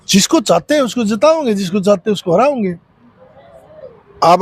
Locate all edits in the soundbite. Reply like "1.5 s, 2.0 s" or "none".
none